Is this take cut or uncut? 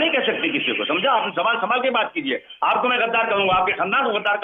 uncut